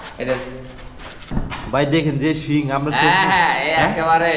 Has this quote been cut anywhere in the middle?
yes; 1 cut; at 1.2 s

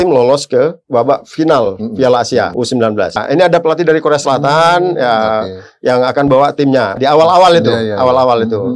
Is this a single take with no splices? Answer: yes; 0 cuts

